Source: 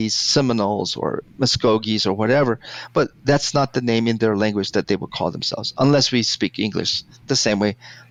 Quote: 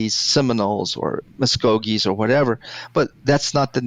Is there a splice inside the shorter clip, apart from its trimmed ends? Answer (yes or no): no